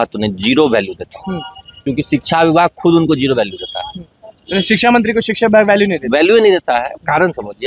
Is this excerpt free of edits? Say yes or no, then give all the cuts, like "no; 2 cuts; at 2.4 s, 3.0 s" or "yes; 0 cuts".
yes; 0 cuts